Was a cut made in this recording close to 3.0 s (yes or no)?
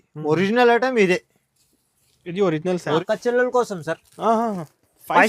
yes